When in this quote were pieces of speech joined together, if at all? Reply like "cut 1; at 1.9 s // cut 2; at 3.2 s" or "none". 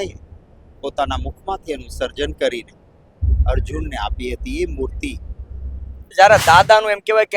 cut 1; at 6.1 s